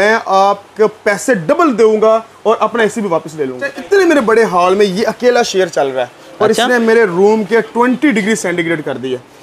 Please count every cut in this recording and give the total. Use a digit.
1